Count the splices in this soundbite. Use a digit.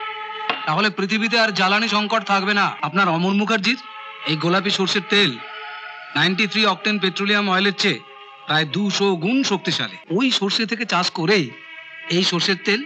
2